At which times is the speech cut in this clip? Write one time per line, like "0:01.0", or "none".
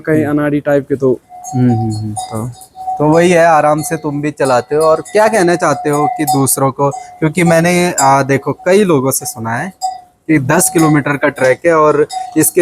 none